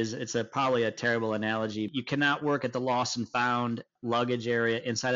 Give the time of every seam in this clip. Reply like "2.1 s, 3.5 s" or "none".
1.9 s, 3.9 s